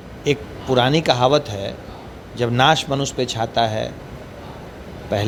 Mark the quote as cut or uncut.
uncut